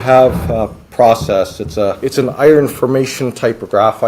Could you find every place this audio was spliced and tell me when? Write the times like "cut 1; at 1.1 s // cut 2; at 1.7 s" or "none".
cut 1; at 2.0 s